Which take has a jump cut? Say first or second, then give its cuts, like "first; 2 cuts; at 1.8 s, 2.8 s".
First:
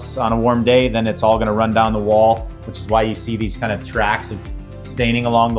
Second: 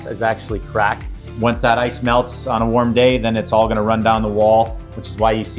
second; 1 cut; at 1.1 s